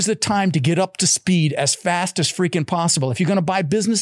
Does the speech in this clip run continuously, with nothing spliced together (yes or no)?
yes